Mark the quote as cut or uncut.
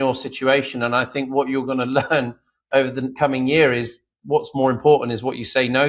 uncut